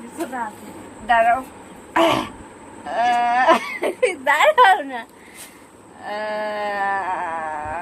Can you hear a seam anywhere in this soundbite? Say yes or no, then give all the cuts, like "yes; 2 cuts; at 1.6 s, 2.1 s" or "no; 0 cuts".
yes; 1 cut; at 1.9 s